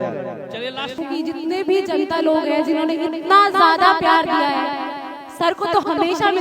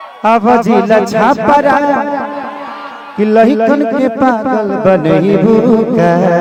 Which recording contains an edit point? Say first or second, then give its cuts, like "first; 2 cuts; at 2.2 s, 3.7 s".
first; 1 cut; at 1.0 s